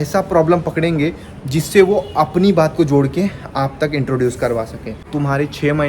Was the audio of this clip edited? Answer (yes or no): yes